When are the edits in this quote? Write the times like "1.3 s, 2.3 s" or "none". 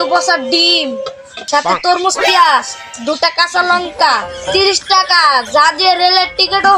none